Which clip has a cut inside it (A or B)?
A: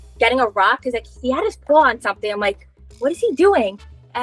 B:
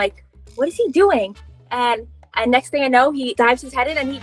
B